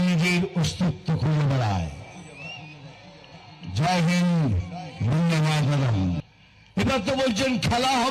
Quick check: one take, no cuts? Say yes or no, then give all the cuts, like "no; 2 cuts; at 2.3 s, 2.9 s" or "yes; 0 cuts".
no; 1 cut; at 6.2 s